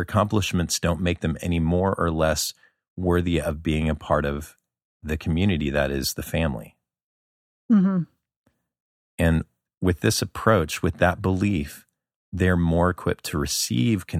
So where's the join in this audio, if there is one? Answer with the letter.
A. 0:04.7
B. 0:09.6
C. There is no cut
B